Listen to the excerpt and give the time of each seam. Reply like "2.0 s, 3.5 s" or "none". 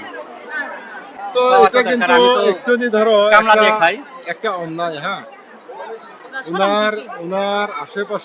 none